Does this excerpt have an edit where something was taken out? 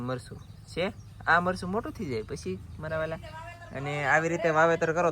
no; 0 cuts

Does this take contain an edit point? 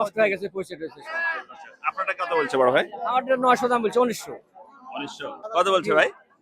yes; 1 cut; at 5.4 s

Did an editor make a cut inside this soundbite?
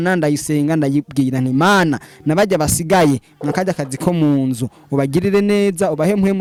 no; 0 cuts

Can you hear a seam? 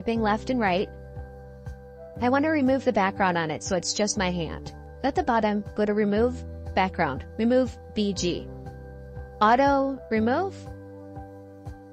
yes; 1 cut; at 10.5 s

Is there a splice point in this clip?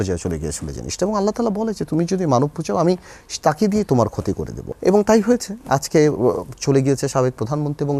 yes; 1 cut; at 4.5 s

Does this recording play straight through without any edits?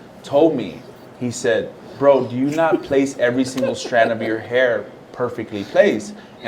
yes; 0 cuts

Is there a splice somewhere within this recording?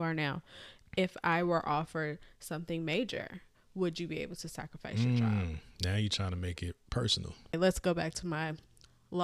yes; 1 cut; at 7.5 s

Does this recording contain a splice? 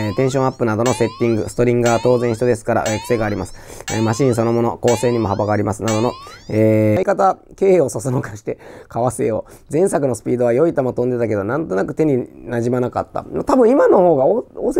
yes; 1 cut; at 7.0 s

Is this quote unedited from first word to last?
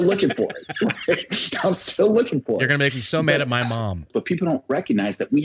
no; 1 cut; at 4.1 s

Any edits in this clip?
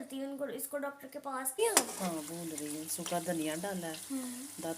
yes; 1 cut; at 1.6 s

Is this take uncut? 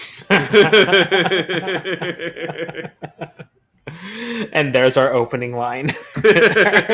yes; 0 cuts

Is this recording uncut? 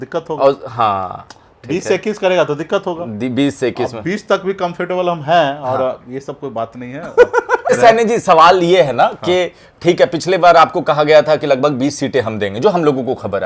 no; 1 cut; at 7.7 s

